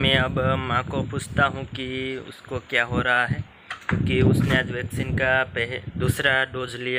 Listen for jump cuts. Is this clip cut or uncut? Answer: uncut